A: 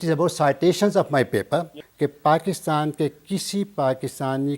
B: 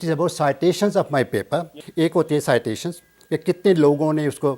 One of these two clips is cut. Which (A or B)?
A